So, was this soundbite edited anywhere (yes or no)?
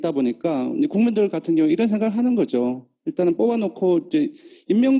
yes